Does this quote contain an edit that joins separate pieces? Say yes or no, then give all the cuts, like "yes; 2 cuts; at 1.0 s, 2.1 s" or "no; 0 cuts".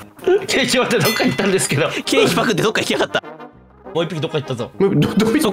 yes; 1 cut; at 3.2 s